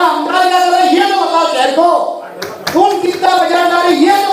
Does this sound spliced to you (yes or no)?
no